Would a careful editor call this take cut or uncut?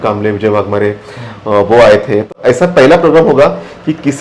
cut